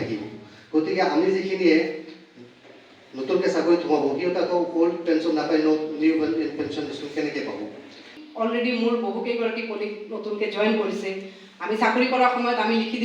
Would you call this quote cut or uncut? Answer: cut